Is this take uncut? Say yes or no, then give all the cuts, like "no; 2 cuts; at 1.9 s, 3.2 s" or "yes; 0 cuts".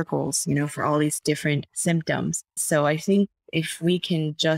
no; 2 cuts; at 1.7 s, 2.6 s